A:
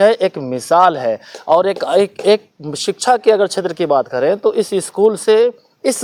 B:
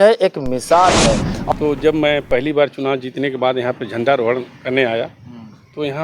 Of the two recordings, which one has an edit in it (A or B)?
B